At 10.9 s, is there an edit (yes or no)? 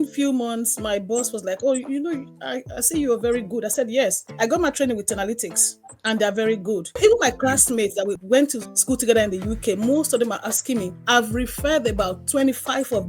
no